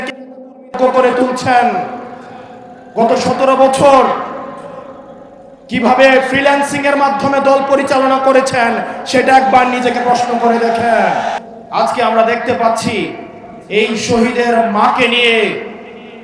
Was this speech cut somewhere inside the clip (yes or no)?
yes